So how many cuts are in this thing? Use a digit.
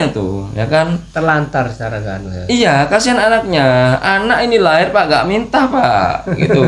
0